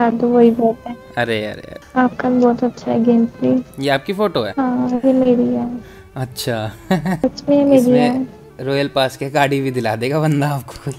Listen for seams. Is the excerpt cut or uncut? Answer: cut